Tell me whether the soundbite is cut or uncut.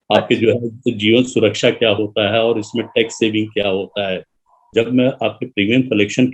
cut